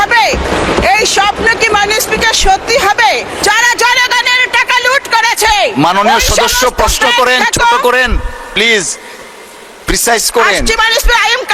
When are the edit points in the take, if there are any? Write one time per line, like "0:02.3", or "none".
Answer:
0:03.4